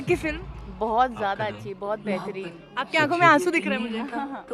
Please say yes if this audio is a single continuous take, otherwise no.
yes